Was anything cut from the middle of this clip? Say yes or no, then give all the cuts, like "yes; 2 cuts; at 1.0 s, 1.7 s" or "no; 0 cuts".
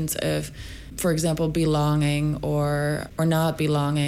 yes; 2 cuts; at 0.9 s, 3.1 s